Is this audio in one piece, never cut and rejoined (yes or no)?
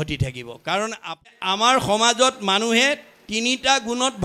no